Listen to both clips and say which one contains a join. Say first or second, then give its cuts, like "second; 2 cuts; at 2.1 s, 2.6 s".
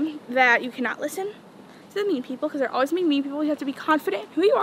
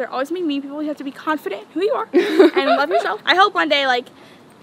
second; 1 cut; at 3.2 s